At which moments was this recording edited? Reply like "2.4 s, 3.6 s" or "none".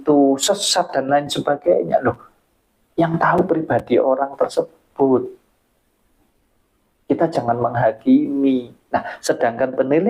none